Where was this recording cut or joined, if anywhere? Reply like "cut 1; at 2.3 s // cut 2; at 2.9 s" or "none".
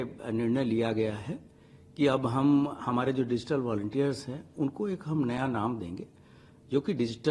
none